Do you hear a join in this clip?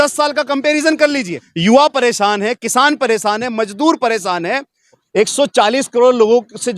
yes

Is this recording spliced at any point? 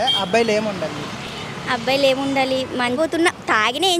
yes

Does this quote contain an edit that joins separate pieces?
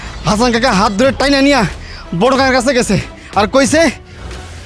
no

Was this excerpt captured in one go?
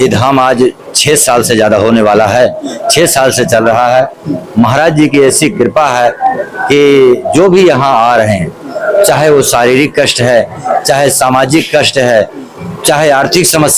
yes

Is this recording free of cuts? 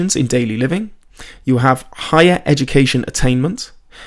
yes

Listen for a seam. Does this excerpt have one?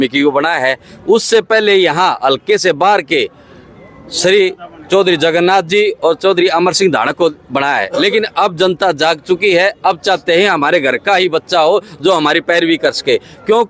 no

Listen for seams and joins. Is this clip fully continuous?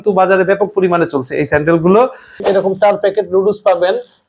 no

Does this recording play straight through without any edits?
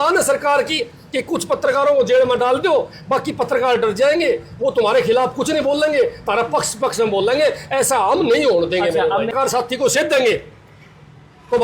no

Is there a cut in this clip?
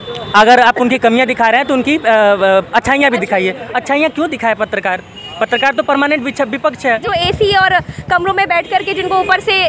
yes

